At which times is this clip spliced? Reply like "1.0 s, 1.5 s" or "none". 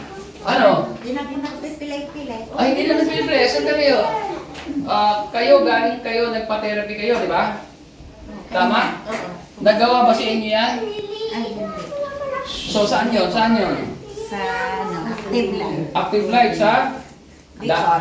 none